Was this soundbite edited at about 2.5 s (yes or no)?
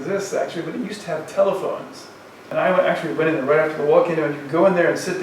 yes